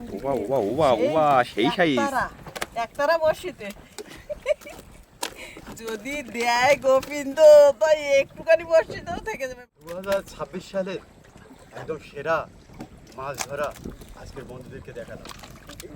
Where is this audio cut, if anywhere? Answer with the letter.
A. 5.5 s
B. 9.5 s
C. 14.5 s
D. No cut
B